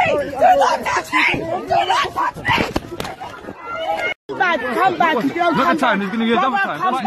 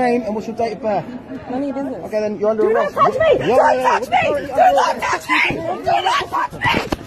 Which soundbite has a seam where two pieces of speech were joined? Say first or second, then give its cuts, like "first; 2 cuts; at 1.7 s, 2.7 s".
first; 1 cut; at 4.2 s